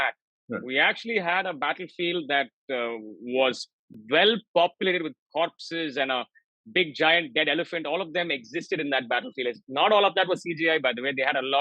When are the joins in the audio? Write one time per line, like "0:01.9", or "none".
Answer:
none